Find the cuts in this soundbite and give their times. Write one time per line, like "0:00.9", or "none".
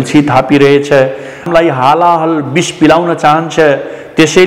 0:01.5